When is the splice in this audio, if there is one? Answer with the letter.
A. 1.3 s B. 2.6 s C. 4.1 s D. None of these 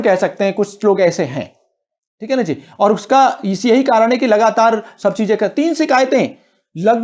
D